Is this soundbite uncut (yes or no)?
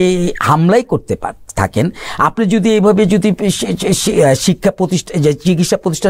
yes